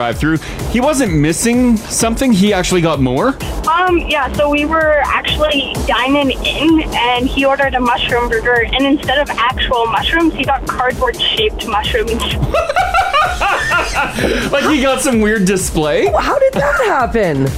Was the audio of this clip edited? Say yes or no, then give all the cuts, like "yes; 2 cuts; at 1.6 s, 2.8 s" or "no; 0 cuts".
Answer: no; 0 cuts